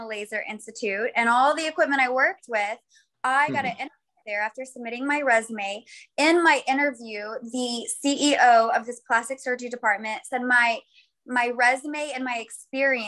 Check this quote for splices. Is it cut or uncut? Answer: uncut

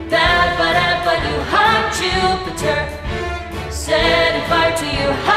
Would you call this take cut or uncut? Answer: uncut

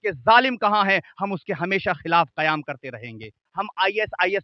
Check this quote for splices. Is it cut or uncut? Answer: cut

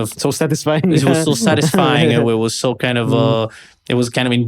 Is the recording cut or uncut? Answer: uncut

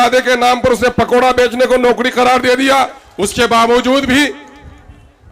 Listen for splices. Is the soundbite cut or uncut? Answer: cut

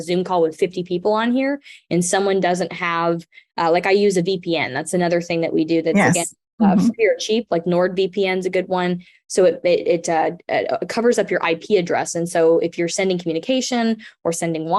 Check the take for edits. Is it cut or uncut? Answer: uncut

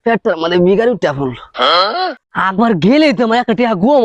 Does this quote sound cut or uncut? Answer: cut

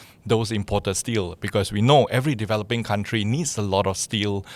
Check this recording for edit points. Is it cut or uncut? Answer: uncut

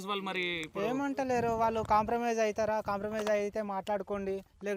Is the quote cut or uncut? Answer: uncut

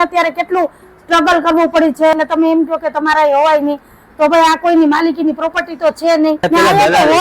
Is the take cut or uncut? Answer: cut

